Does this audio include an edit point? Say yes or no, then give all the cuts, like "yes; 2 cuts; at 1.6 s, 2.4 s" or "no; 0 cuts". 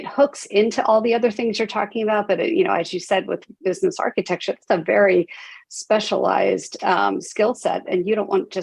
no; 0 cuts